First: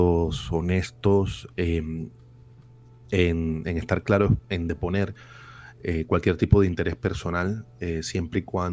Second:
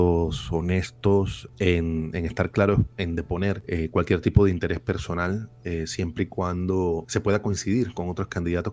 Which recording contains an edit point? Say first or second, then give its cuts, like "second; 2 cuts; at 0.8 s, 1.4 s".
second; 3 cuts; at 1.4 s, 3.6 s, 7.1 s